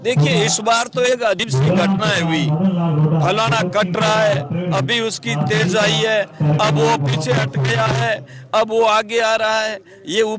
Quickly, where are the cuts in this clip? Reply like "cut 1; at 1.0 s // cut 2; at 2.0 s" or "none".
cut 1; at 1.5 s